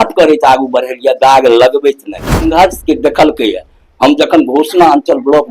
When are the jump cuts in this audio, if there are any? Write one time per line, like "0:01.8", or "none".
0:02.5